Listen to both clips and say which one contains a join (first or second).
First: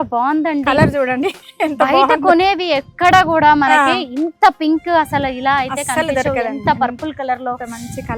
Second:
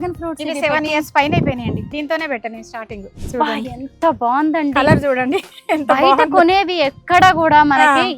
second